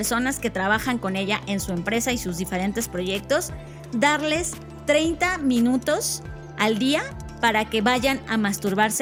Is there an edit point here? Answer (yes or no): no